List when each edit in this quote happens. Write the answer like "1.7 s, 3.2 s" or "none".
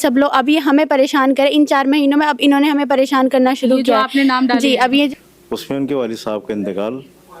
5.1 s